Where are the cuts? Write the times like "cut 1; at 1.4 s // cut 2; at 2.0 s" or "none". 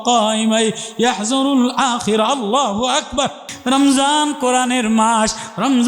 cut 1; at 3.5 s